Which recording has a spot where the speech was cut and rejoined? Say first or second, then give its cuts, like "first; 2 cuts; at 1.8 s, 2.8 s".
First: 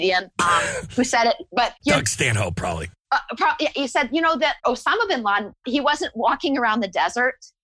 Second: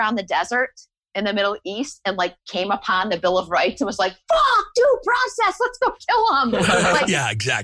first; 4 cuts; at 1.8 s, 2.9 s, 4.6 s, 5.6 s